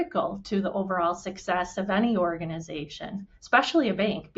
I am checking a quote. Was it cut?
no; 0 cuts

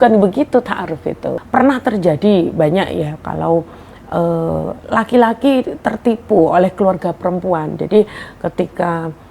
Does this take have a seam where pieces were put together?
yes; 1 cut; at 1.3 s

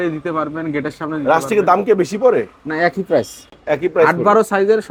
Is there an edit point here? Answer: no; 0 cuts

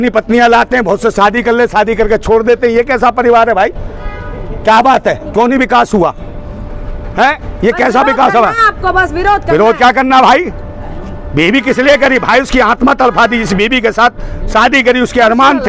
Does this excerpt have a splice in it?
no; 0 cuts

